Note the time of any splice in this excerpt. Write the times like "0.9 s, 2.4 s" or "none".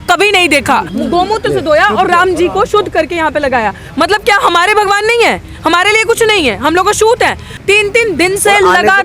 0.9 s, 7.5 s

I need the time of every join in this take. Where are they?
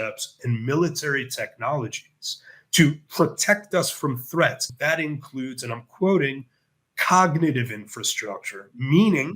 4.6 s

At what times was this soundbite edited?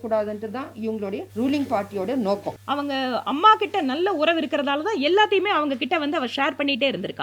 1.3 s, 2.6 s

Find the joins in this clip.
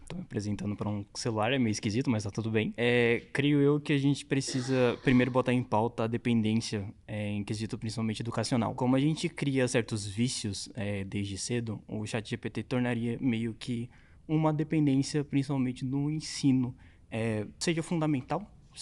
none

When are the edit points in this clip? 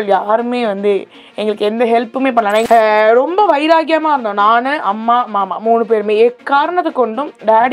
2.6 s

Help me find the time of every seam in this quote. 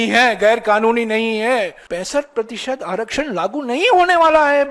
1.8 s

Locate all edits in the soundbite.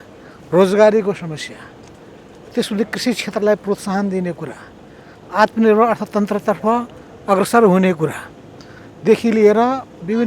none

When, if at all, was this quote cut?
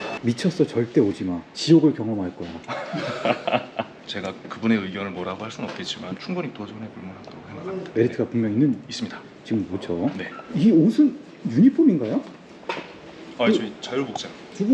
none

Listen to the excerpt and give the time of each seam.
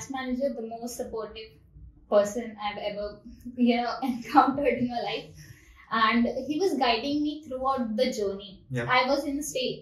none

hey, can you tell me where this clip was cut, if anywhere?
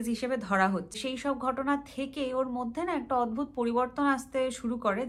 1.0 s

